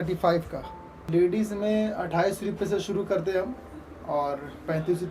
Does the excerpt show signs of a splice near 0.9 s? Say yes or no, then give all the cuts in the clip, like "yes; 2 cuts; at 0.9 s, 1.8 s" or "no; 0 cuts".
yes; 1 cut; at 0.9 s